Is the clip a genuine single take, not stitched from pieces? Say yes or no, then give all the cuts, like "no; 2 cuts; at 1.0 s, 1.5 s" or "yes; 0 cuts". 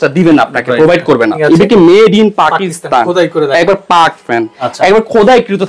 no; 2 cuts; at 1.4 s, 4.6 s